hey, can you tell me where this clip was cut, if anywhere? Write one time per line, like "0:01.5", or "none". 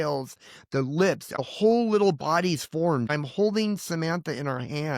0:01.4
0:03.1